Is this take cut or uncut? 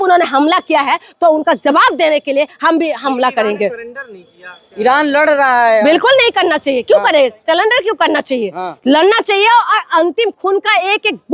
uncut